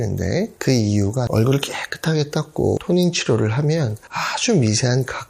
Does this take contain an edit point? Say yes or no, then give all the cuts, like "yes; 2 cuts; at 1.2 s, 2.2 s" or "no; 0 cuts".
yes; 2 cuts; at 1.3 s, 2.8 s